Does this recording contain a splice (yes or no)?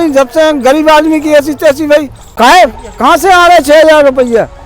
yes